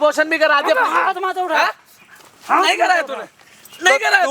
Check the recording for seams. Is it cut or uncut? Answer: uncut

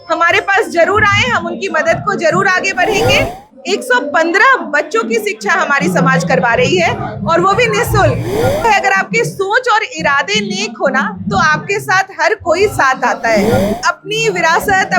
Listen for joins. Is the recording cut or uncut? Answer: cut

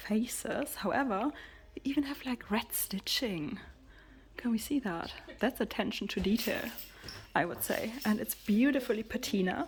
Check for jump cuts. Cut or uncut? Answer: uncut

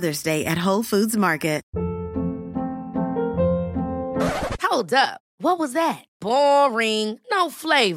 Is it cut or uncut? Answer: cut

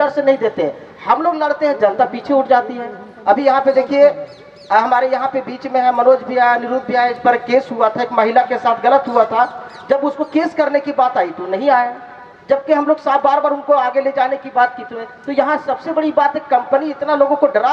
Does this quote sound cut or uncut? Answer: uncut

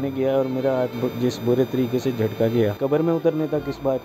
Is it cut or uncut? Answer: cut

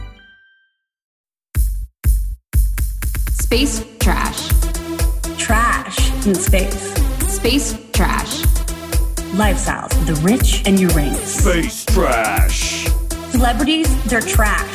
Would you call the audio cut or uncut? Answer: cut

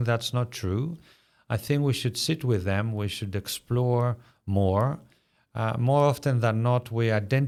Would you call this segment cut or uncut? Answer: uncut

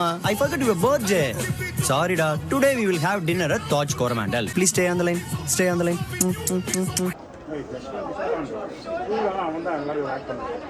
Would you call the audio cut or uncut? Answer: cut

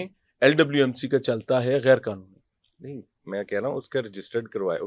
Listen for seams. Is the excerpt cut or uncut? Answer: uncut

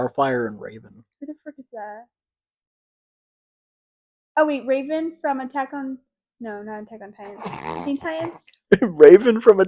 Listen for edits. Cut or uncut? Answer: uncut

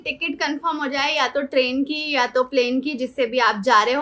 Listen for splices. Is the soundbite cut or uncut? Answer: uncut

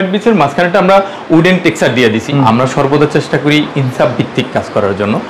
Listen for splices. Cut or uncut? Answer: cut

